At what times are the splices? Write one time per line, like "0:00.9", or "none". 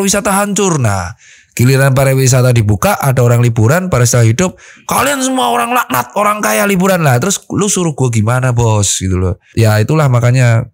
0:09.5